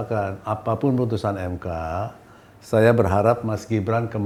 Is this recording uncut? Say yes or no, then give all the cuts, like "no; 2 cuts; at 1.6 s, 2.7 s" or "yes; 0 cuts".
yes; 0 cuts